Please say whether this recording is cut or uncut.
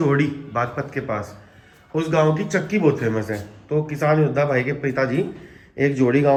uncut